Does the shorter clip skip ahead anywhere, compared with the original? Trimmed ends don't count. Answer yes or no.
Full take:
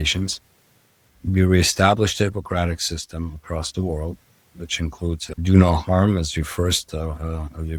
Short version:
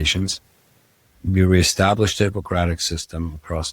no